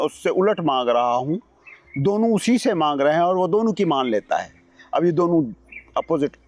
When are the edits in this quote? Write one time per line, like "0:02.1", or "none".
none